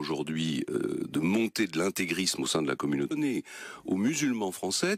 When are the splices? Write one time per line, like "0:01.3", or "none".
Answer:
none